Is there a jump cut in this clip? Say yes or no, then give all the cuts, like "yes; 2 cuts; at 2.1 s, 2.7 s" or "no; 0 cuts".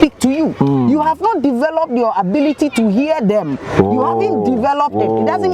no; 0 cuts